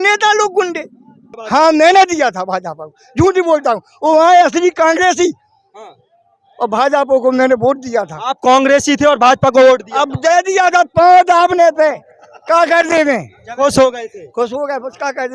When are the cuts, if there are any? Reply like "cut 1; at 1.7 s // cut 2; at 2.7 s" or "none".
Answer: cut 1; at 1.4 s

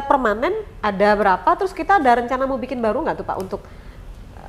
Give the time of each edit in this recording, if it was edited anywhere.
none

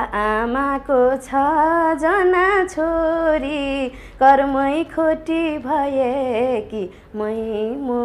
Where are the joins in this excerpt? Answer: none

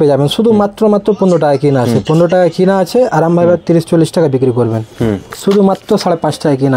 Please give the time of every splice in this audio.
cut 1; at 5.4 s

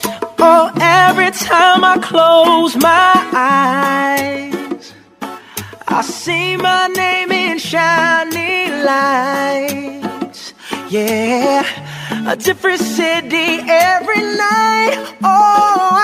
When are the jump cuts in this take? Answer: none

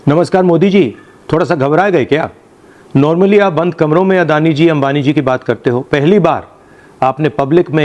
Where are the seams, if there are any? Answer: none

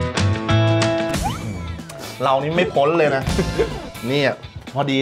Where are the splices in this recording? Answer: cut 1; at 1.1 s // cut 2; at 3.9 s

